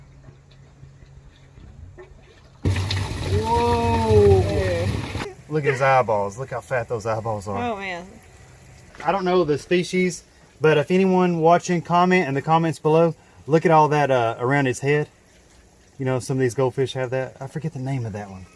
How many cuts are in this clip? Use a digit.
2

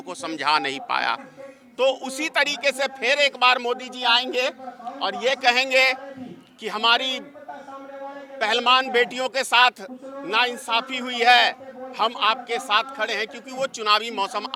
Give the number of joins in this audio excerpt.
0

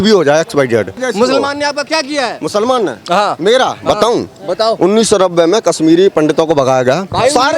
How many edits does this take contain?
1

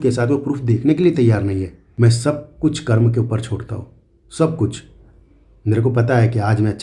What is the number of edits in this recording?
1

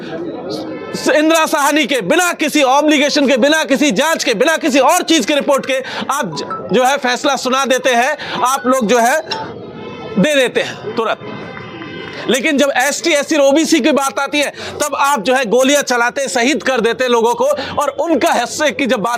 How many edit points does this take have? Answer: 0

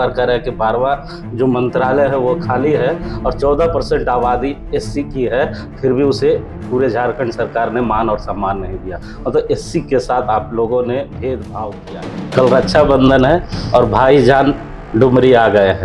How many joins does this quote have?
1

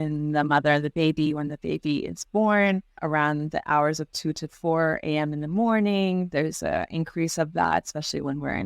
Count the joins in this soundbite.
1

